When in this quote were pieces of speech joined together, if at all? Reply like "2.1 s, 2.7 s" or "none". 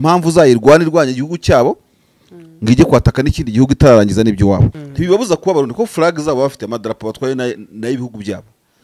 4.8 s